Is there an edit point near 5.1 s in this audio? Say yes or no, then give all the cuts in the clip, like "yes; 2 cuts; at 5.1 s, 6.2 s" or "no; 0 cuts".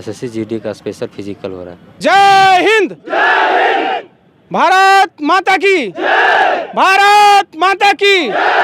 no; 1 cut; at 1.8 s